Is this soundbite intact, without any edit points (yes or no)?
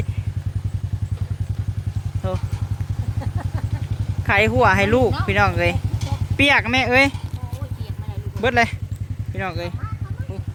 yes